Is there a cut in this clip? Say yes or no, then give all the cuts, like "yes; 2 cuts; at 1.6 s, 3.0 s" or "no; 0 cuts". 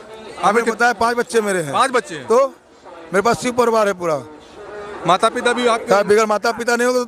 no; 0 cuts